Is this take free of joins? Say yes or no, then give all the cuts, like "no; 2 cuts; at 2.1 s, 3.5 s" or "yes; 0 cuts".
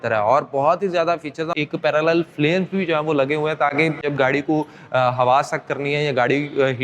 no; 2 cuts; at 1.6 s, 4.0 s